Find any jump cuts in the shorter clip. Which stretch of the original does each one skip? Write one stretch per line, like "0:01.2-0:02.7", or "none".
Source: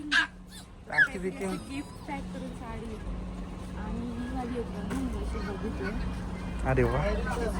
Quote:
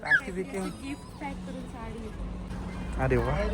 0:03.4-0:06.2